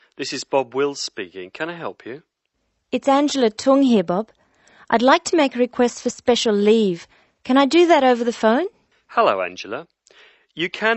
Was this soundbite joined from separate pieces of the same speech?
no; 0 cuts

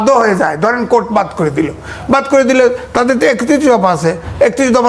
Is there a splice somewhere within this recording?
no; 0 cuts

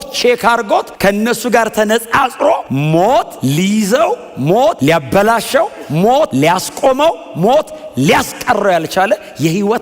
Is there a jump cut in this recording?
yes; 5 cuts; at 0.9 s, 2.7 s, 3.3 s, 4.8 s, 6.3 s

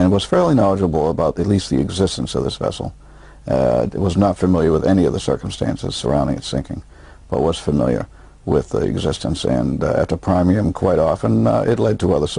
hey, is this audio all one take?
no; 1 cut; at 9.6 s

